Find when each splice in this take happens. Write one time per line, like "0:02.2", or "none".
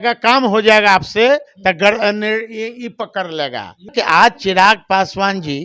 0:03.9